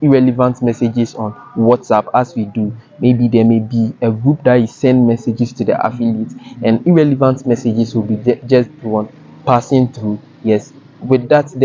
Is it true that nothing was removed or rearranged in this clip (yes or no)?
yes